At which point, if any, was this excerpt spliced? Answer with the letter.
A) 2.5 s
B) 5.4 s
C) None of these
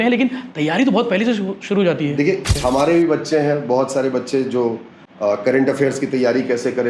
A